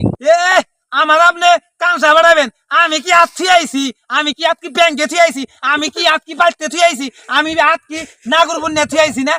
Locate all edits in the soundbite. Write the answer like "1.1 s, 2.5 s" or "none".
none